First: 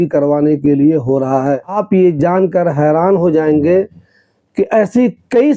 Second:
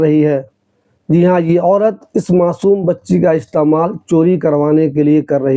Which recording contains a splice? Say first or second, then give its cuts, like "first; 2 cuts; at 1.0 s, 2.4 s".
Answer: first; 1 cut; at 1.8 s